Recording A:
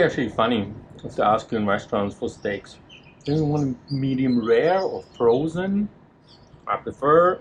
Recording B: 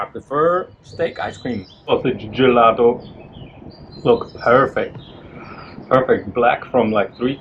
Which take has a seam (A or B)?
B